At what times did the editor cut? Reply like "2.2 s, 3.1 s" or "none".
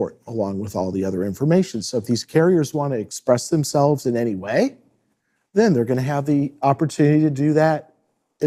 none